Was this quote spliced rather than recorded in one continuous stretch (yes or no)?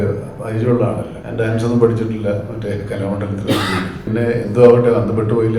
yes